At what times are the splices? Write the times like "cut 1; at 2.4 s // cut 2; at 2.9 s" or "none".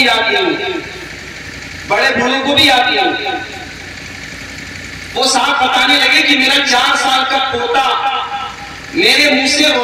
none